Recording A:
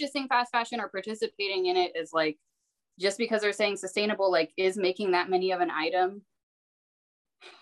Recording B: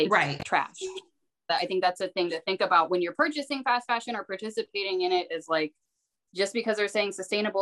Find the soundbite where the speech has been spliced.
B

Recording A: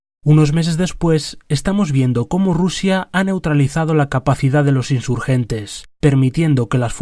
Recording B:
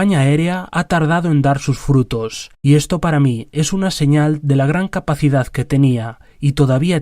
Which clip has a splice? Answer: B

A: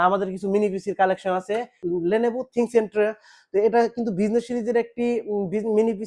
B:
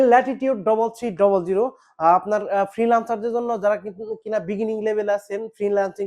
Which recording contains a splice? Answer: A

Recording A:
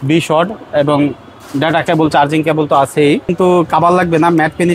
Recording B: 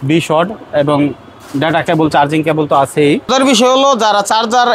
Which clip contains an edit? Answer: A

